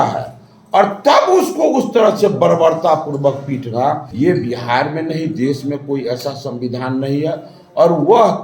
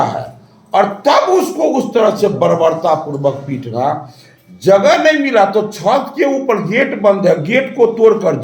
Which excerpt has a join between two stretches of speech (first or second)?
first